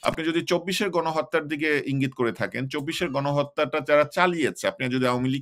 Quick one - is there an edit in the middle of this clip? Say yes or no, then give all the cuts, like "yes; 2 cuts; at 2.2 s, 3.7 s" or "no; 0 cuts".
no; 0 cuts